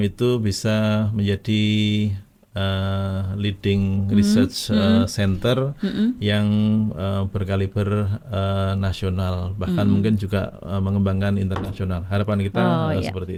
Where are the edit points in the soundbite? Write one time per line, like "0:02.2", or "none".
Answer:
none